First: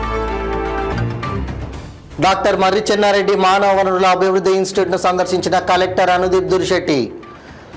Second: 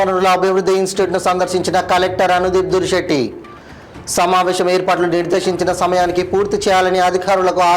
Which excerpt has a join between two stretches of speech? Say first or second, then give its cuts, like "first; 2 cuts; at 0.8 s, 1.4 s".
first; 1 cut; at 0.9 s